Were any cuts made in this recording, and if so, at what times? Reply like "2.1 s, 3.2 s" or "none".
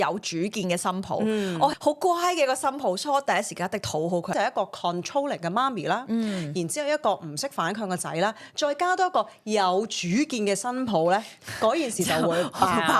1.7 s, 4.3 s